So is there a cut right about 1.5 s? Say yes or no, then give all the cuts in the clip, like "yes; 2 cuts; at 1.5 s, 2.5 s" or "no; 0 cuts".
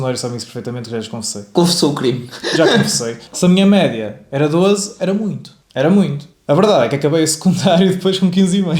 no; 1 cut; at 3.2 s